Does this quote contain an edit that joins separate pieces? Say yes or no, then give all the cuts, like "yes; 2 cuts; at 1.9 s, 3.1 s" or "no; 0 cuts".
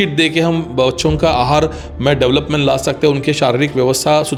no; 0 cuts